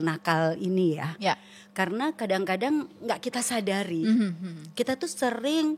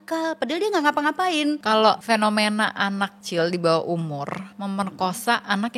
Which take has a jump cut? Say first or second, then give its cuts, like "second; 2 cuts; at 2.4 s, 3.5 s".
second; 3 cuts; at 1.8 s, 3.2 s, 4.5 s